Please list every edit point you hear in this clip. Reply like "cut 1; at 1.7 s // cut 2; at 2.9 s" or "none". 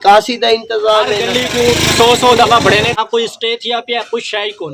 cut 1; at 1.2 s // cut 2; at 2.9 s